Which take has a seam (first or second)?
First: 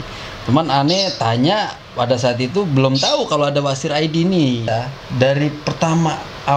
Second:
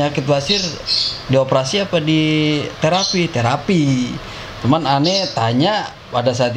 first